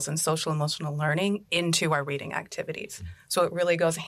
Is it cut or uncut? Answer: uncut